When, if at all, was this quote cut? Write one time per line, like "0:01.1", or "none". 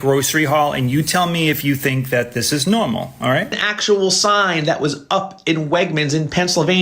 0:03.7